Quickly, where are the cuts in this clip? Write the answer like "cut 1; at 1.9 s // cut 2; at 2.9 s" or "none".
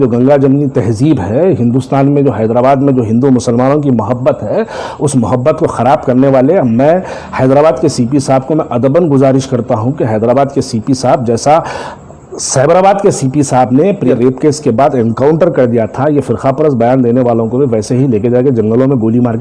cut 1; at 14.1 s